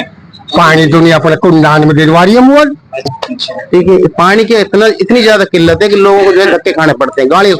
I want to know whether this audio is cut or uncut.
cut